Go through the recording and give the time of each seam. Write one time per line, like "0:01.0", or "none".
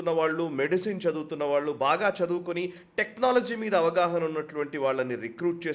none